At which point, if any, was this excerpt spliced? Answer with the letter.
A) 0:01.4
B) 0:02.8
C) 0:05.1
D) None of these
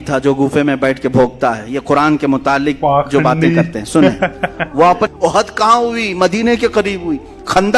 C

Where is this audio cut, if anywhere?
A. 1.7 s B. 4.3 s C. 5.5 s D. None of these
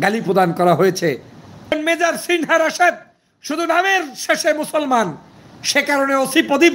A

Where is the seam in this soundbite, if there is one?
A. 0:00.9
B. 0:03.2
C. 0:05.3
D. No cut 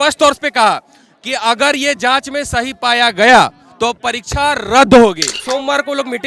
C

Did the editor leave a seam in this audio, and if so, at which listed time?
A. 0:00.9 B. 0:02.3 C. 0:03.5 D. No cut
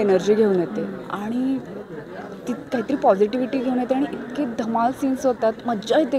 D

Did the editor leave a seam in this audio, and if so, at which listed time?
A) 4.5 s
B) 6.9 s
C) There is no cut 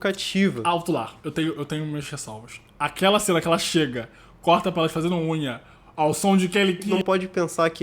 B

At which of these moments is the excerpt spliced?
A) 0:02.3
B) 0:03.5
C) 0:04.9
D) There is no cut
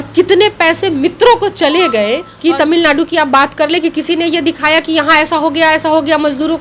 A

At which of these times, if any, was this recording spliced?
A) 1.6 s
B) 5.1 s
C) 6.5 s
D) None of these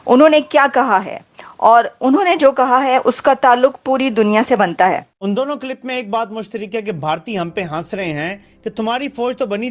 B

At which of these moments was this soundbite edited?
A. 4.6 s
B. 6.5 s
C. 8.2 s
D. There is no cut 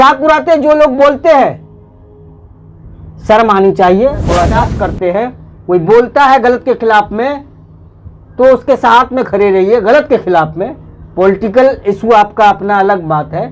A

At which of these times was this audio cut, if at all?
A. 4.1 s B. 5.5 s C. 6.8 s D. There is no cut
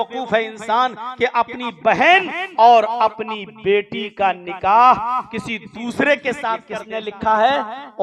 C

